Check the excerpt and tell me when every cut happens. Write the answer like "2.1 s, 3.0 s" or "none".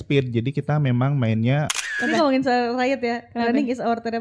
1.8 s